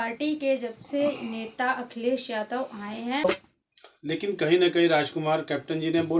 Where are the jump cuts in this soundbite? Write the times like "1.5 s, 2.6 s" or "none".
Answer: 3.2 s